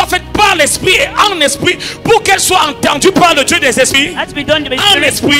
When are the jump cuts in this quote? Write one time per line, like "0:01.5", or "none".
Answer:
none